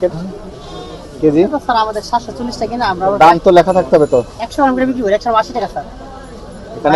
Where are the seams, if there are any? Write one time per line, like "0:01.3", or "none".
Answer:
none